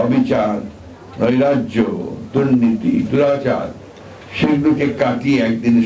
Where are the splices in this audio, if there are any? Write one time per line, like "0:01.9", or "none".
none